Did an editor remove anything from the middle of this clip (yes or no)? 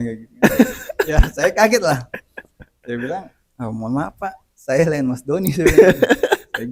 no